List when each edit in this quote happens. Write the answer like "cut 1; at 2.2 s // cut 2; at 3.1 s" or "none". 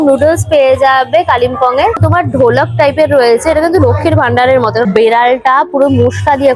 cut 1; at 2.0 s // cut 2; at 4.8 s